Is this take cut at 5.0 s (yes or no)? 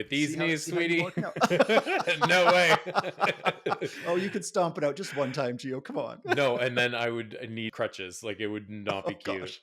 no